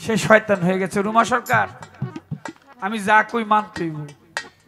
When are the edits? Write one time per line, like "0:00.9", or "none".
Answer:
none